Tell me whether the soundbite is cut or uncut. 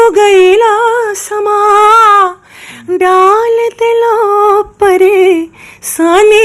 uncut